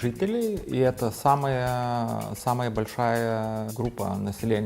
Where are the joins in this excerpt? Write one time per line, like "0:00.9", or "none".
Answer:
0:03.7